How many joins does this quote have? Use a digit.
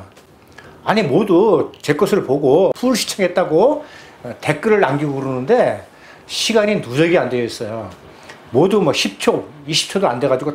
1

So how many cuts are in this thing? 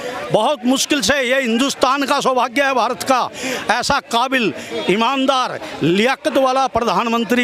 0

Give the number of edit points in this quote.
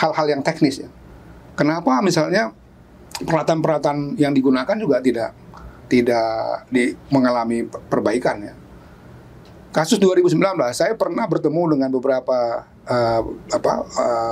0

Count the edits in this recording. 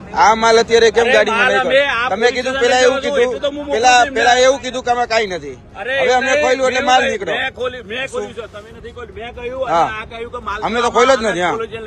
0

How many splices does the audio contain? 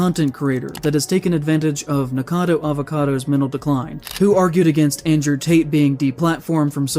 1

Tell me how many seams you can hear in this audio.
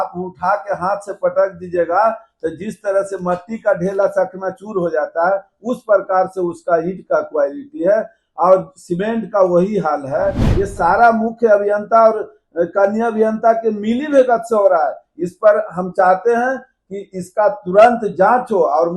1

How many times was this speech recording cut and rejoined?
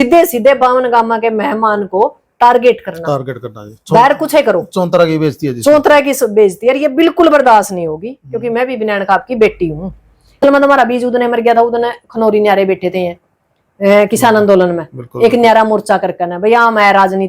1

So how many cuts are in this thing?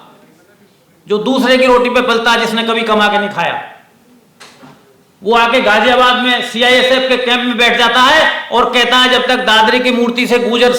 0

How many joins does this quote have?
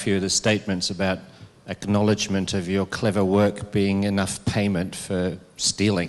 0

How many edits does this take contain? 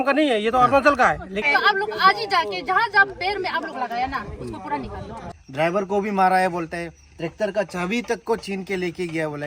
2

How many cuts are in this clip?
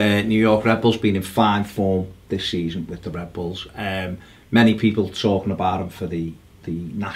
0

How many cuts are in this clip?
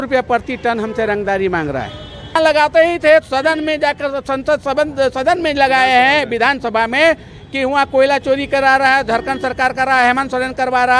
1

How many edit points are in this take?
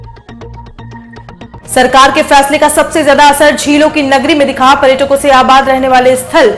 1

